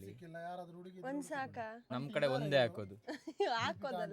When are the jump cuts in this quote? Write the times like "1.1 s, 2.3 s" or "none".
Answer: 1.9 s